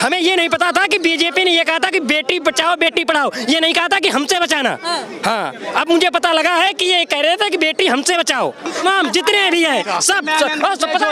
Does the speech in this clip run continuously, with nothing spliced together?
no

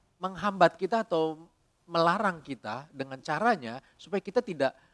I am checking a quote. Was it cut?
no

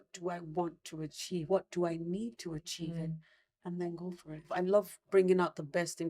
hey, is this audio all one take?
no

